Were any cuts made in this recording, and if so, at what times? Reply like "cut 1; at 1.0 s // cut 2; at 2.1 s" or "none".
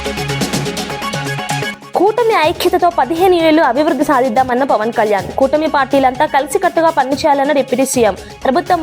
cut 1; at 1.7 s